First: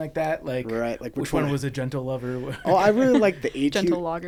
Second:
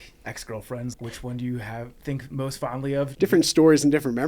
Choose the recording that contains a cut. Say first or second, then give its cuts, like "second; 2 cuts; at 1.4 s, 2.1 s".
second; 2 cuts; at 0.9 s, 3.1 s